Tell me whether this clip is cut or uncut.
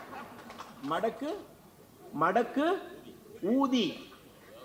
uncut